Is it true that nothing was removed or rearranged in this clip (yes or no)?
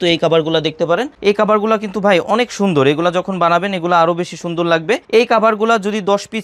yes